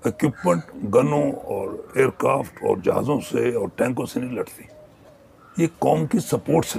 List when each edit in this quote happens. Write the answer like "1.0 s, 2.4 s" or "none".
none